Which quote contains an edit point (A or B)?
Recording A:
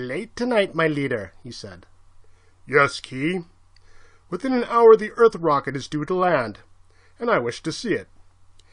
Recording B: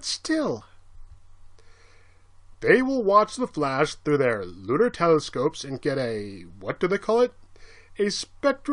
A